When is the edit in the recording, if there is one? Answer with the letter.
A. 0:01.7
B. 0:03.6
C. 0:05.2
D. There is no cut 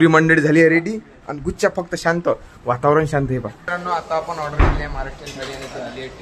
B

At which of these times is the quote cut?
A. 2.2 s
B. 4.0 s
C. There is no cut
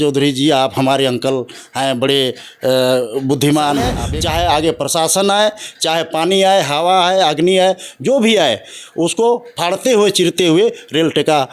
B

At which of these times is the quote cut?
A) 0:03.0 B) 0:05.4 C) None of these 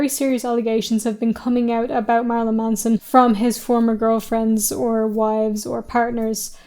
A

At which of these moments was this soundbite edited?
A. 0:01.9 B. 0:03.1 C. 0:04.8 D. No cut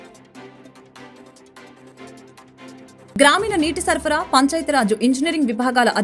A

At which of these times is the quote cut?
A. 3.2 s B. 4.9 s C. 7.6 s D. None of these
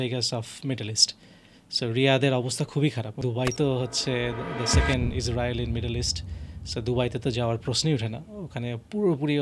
A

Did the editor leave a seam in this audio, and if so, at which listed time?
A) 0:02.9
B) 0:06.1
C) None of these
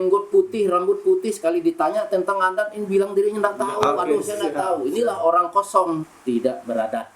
B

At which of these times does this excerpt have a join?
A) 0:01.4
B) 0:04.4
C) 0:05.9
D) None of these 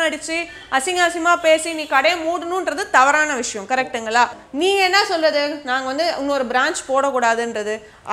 B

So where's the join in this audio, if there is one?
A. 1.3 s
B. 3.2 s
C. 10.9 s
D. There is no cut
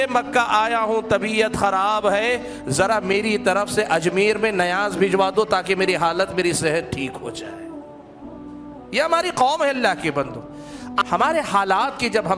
C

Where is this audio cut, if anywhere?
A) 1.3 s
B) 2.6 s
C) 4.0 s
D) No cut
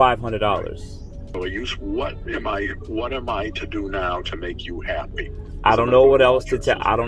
A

